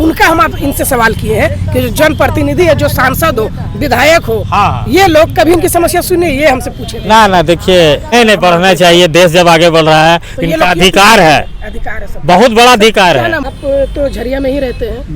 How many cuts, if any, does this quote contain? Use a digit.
2